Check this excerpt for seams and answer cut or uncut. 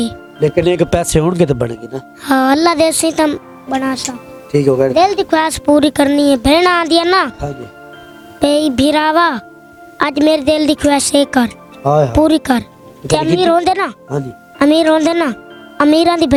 uncut